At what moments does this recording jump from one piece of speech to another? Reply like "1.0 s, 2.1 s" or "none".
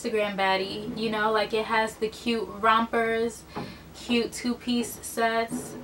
none